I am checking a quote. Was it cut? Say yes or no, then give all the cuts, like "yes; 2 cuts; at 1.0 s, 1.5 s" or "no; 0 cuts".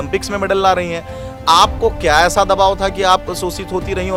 no; 0 cuts